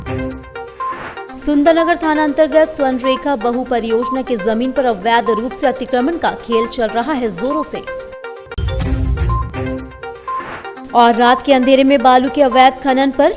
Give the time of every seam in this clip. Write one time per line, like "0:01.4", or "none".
0:01.3